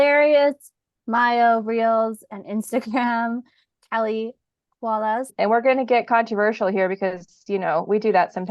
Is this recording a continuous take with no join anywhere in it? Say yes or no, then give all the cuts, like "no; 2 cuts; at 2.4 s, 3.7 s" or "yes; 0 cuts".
no; 1 cut; at 5.3 s